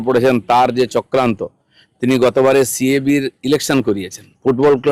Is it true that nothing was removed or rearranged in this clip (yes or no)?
yes